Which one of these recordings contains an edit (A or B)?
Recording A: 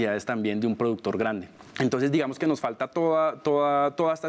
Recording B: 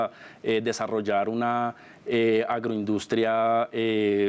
A